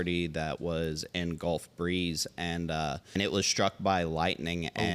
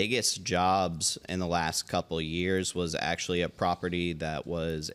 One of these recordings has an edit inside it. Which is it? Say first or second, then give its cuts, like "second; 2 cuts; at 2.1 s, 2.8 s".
first; 1 cut; at 3.1 s